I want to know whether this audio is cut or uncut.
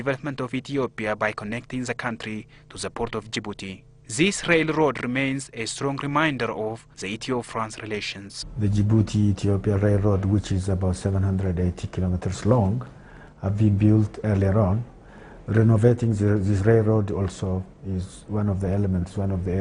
uncut